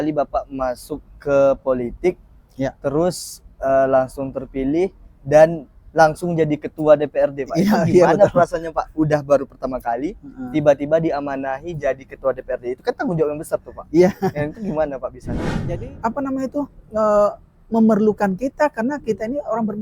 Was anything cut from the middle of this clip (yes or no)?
yes